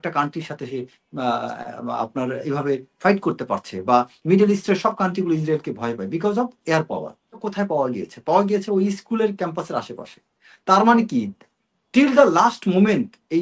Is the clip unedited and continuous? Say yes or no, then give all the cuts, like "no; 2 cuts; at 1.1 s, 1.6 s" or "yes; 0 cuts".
no; 1 cut; at 7.5 s